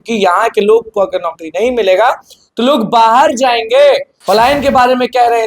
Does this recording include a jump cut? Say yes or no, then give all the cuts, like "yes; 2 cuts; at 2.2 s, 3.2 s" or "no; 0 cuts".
yes; 1 cut; at 4.1 s